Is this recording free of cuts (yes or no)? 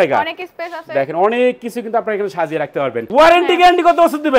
no